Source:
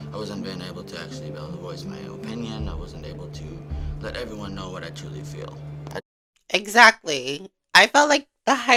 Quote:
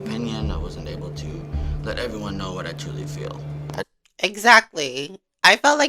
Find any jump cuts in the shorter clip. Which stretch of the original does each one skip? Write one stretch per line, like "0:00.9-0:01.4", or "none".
0:06.2-0:06.3